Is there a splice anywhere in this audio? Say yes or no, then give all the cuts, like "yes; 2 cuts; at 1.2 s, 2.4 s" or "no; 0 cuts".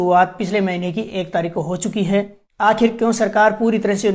yes; 1 cut; at 2.4 s